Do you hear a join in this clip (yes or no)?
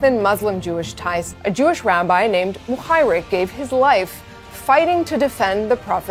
no